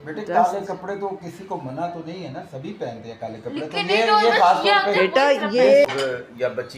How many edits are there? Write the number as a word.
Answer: one